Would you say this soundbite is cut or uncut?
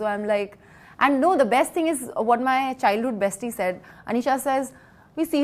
uncut